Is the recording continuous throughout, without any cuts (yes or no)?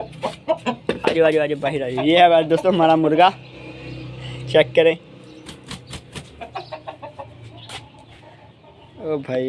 yes